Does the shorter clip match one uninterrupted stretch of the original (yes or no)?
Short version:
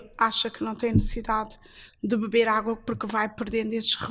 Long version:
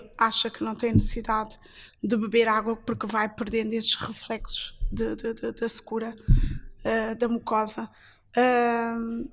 yes